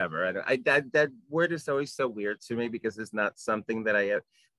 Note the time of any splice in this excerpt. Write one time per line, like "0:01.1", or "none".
none